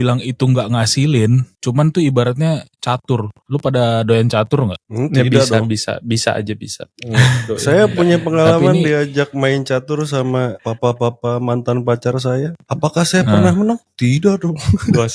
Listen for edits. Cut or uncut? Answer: uncut